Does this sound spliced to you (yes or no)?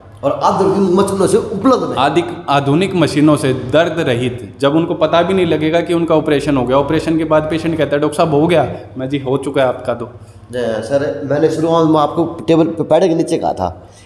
no